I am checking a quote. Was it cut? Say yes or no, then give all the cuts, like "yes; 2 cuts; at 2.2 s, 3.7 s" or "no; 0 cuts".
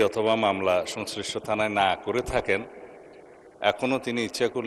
no; 0 cuts